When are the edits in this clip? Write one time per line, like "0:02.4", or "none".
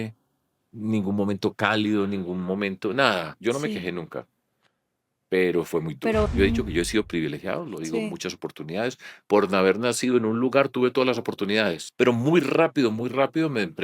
0:03.3
0:06.3
0:11.8

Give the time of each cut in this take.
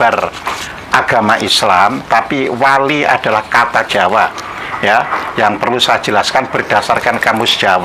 none

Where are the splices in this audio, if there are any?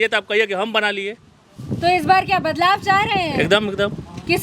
none

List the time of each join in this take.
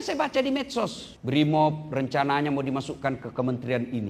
0:01.1

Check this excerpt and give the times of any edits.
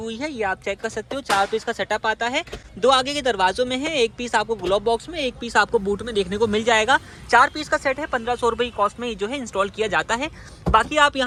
none

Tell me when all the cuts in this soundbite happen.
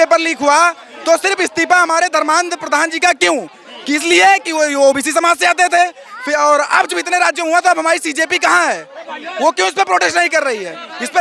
none

